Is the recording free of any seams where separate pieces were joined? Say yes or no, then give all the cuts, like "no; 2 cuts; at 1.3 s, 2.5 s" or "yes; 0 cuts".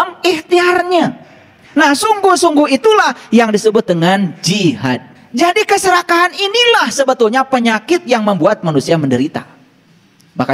no; 1 cut; at 5.2 s